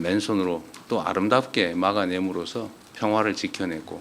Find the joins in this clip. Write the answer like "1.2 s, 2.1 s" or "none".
2.8 s